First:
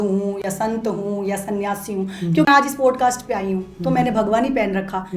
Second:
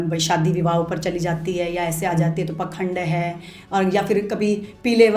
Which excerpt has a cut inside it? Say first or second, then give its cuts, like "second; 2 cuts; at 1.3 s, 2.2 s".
first; 1 cut; at 2.5 s